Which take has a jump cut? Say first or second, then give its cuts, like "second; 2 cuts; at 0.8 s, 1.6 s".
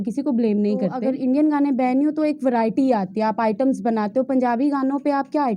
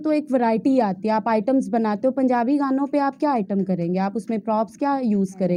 first; 1 cut; at 1.0 s